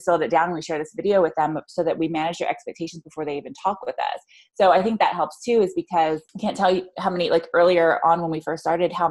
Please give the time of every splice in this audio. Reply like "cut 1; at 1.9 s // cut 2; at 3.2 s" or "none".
cut 1; at 6.3 s